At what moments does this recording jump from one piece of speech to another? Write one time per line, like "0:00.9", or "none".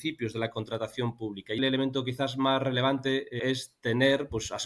0:01.6
0:03.4